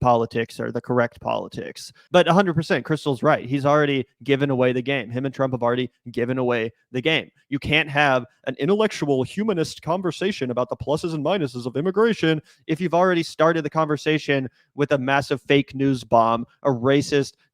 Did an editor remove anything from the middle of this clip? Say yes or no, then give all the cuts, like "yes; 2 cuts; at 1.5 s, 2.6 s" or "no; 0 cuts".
yes; 1 cut; at 1.9 s